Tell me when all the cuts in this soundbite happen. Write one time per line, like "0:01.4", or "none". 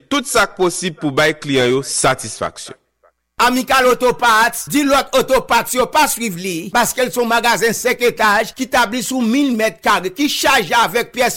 0:03.1